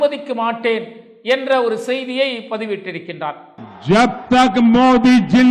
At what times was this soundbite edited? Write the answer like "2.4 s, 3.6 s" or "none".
none